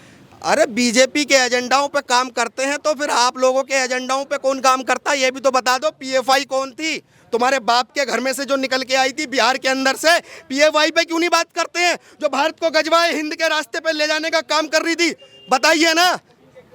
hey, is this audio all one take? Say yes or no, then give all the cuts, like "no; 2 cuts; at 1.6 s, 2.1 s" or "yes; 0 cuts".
yes; 0 cuts